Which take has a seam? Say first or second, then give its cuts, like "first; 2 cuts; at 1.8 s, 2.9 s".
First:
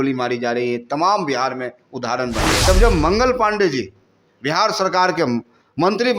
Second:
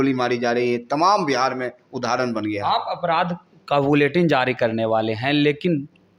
first; 1 cut; at 2.7 s